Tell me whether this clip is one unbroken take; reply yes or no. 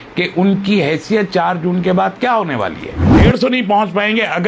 no